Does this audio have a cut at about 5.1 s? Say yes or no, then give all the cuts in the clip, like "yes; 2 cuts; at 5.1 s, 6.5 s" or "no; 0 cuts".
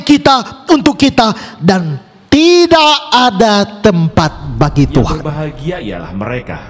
yes; 1 cut; at 5.1 s